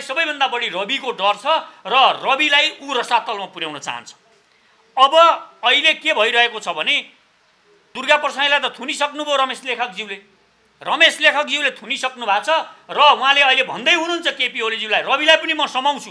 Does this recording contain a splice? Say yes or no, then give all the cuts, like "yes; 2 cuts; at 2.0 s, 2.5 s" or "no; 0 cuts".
yes; 1 cut; at 8.0 s